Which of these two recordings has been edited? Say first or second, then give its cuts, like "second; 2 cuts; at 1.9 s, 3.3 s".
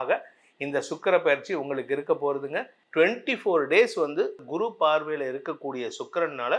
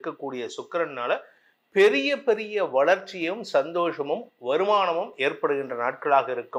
first; 2 cuts; at 2.8 s, 4.4 s